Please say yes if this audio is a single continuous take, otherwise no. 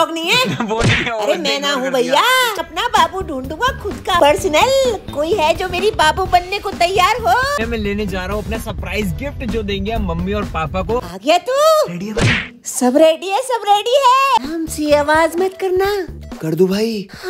no